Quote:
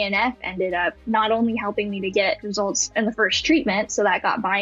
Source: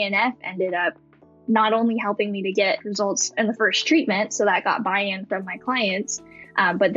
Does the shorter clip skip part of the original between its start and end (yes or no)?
yes